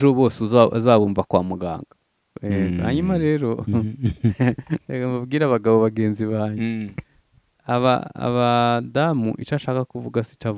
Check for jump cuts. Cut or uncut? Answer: cut